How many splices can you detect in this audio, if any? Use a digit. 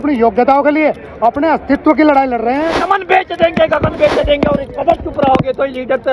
1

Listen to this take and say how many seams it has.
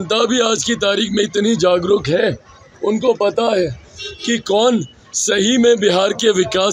0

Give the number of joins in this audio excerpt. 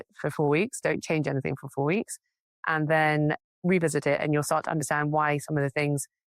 0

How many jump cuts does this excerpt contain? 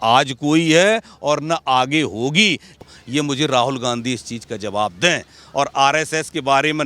1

